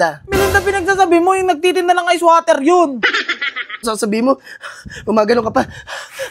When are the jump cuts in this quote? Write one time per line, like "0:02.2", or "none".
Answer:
0:03.9

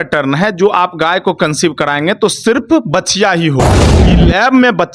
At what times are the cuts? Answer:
0:03.8

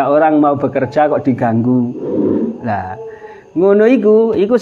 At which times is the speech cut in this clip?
none

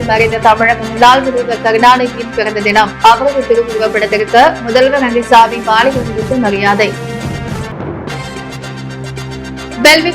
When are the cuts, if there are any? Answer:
none

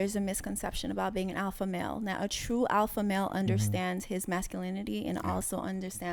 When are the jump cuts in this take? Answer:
none

